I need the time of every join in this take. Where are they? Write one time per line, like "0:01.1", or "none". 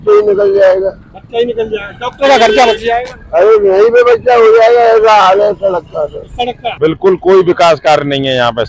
0:06.7